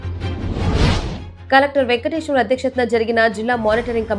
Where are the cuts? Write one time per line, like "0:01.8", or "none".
none